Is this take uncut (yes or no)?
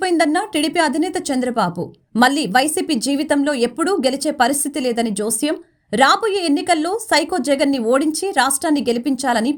yes